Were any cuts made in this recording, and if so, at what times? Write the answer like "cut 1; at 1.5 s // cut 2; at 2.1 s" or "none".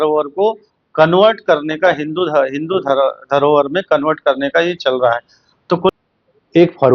cut 1; at 5.9 s